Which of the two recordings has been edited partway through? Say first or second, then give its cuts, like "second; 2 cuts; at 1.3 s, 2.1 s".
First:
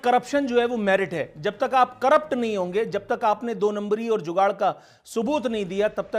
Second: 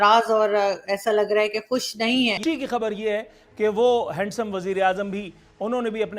second; 1 cut; at 2.4 s